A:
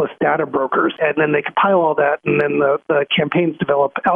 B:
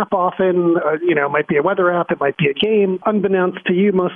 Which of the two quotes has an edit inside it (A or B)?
A